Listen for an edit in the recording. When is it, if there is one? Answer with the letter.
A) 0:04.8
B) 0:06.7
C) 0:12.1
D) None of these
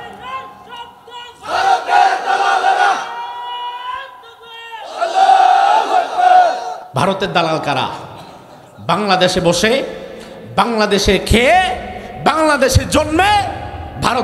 D